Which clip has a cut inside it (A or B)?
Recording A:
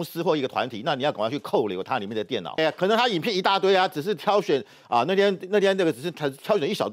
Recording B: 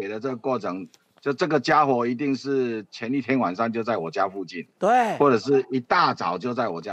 A